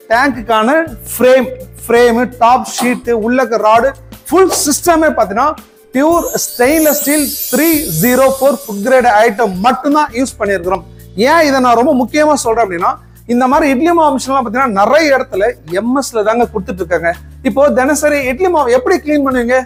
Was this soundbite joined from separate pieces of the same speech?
no; 0 cuts

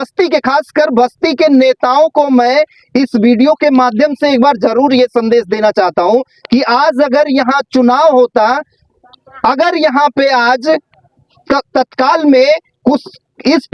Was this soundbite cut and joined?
no; 0 cuts

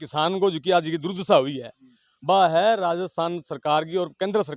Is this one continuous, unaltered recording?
yes; 0 cuts

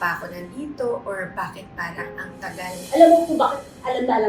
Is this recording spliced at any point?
yes; 1 cut; at 2.8 s

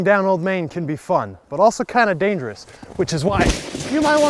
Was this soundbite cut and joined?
no; 0 cuts

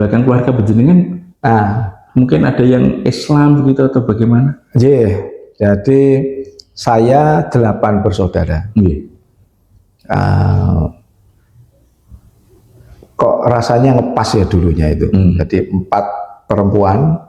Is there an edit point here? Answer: no; 0 cuts

